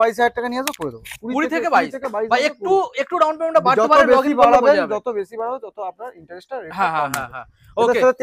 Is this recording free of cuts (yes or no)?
yes